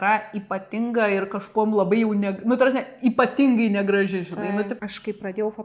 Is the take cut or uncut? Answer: cut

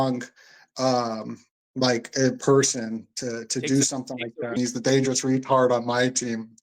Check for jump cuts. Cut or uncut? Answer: cut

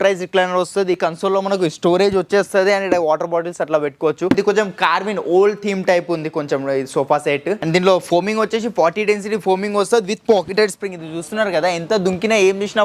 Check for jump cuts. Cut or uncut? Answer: cut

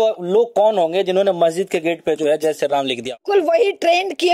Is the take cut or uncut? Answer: cut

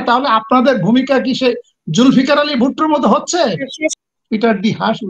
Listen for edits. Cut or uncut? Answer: cut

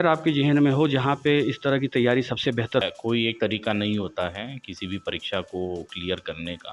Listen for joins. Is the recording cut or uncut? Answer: cut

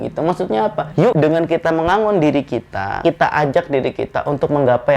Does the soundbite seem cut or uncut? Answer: cut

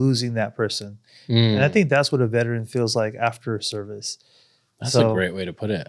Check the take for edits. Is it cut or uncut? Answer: uncut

